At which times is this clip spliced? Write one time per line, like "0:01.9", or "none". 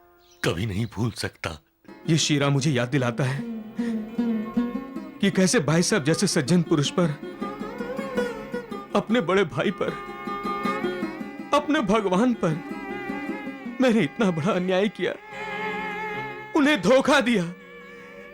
0:01.9